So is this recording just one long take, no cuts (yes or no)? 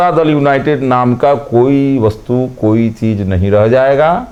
yes